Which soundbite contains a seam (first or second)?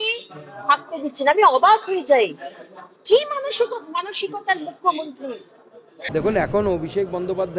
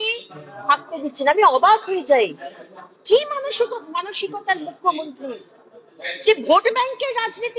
first